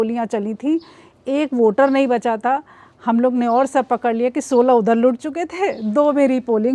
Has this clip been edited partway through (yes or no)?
no